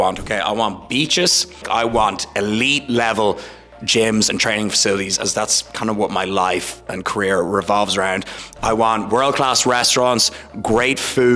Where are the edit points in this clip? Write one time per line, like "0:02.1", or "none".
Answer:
0:01.6